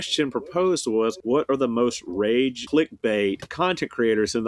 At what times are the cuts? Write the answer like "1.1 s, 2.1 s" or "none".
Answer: 1.2 s, 2.6 s, 3.5 s